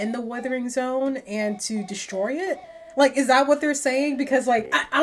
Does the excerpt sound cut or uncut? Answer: uncut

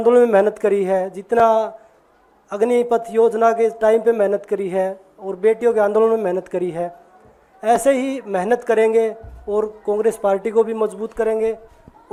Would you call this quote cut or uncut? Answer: uncut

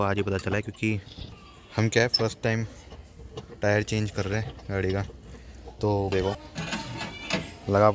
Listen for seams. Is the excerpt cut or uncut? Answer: cut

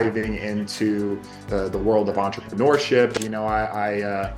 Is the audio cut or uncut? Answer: cut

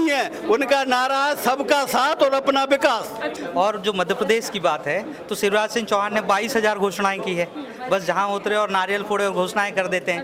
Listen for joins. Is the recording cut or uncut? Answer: cut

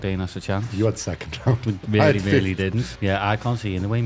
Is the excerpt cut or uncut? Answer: cut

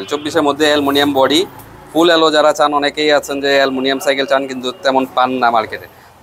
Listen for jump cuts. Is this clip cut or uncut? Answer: uncut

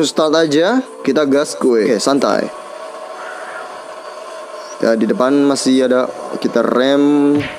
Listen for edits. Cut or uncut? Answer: cut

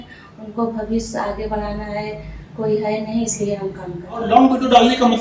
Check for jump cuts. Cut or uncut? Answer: cut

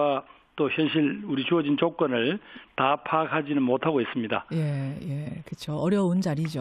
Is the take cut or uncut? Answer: cut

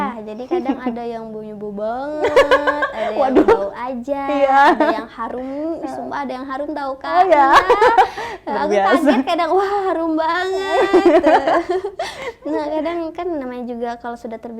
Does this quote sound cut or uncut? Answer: uncut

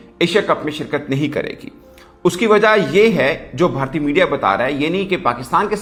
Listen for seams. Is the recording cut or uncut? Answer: uncut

